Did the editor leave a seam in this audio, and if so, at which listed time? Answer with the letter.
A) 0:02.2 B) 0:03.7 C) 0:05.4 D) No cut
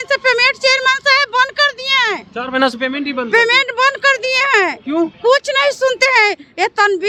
D